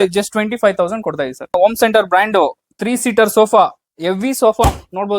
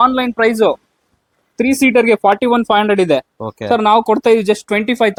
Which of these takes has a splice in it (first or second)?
first